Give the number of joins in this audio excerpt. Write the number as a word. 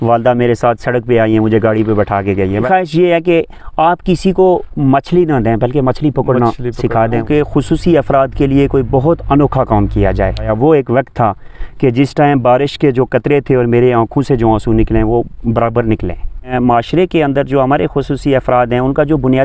four